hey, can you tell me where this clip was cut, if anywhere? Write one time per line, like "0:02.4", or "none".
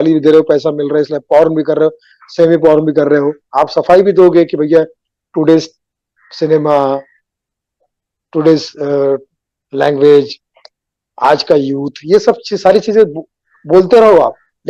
0:03.4